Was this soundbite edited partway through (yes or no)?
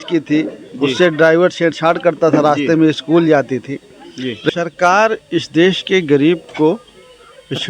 yes